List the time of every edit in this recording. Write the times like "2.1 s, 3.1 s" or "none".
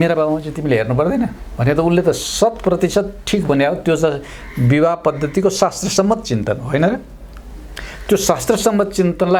none

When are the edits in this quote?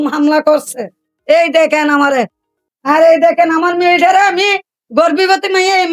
none

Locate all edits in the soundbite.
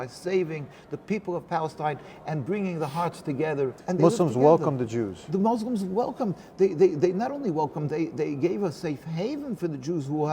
3.8 s

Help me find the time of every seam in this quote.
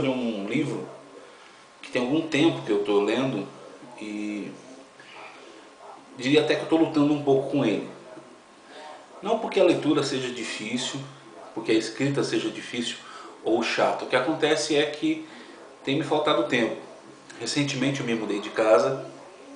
5.6 s

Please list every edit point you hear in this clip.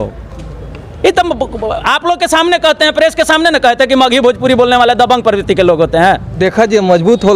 6.3 s

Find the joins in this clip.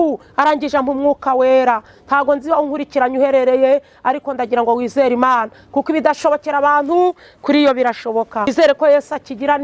8.5 s

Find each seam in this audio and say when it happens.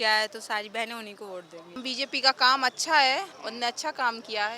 1.8 s, 3.4 s

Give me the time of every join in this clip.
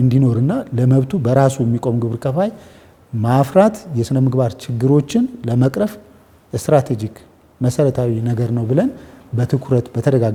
none

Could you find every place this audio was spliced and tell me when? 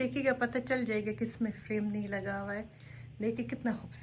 none

